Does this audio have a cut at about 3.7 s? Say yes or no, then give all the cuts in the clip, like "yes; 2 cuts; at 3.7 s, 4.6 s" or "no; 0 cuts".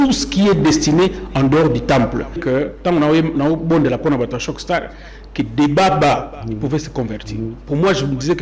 no; 1 cut; at 2.4 s